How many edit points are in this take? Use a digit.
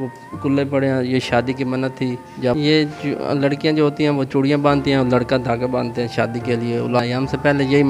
2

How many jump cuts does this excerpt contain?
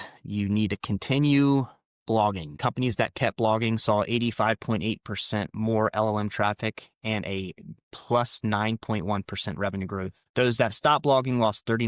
2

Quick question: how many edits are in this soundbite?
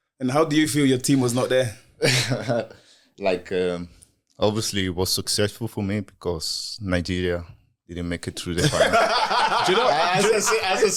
0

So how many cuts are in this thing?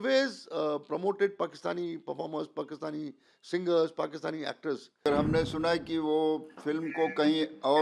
1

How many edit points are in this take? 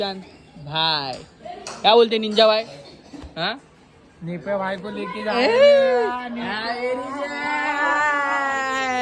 0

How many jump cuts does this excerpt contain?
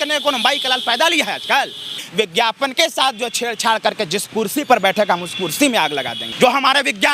2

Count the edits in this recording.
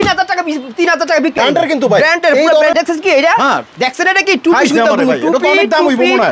2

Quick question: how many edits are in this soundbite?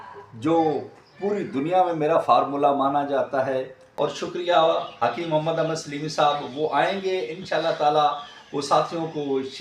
1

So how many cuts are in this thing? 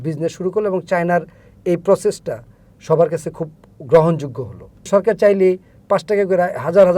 1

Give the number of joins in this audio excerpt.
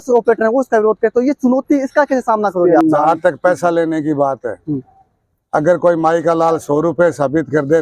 1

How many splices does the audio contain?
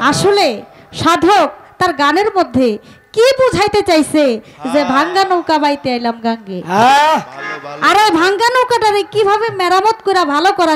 0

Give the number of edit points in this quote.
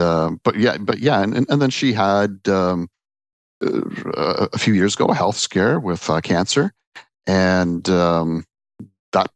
0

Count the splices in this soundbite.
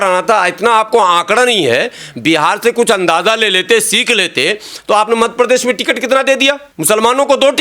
1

